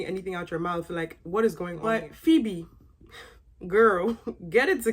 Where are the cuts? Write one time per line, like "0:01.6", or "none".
0:01.7